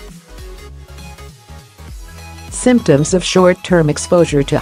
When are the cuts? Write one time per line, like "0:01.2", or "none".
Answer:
none